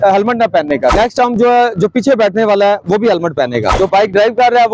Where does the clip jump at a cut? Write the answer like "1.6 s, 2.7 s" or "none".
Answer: 0.9 s, 3.7 s